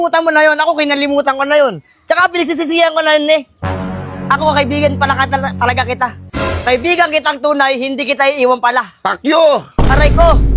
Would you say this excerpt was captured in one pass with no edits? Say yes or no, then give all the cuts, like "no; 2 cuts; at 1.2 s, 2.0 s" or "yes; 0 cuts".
yes; 0 cuts